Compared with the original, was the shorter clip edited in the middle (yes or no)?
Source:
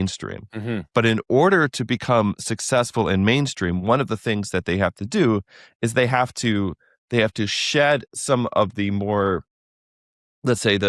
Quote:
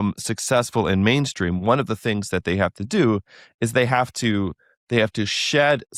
no